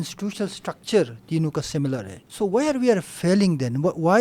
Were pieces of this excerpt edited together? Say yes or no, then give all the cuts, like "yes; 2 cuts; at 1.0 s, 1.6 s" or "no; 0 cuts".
yes; 1 cut; at 2.2 s